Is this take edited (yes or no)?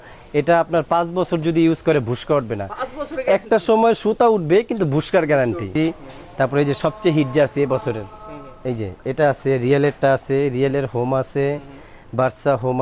yes